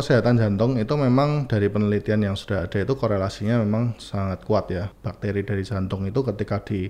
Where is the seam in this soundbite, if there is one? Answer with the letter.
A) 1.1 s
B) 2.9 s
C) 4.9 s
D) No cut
C